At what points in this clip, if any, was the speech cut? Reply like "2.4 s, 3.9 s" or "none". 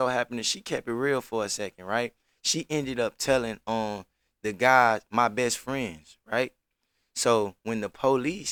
none